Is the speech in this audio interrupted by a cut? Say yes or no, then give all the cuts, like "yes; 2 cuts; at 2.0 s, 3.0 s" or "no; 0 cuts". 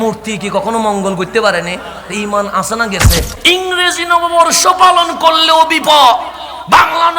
yes; 1 cut; at 3.4 s